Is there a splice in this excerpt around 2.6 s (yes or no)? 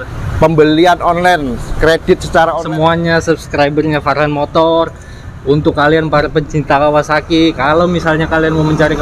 yes